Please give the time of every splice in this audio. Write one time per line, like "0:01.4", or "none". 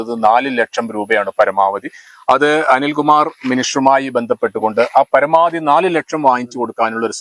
none